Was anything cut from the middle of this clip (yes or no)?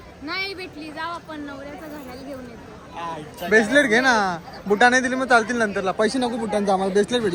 no